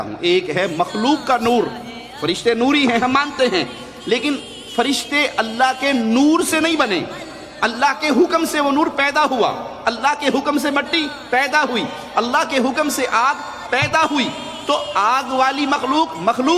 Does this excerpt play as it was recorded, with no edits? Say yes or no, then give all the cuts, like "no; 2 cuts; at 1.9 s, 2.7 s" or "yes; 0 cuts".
yes; 0 cuts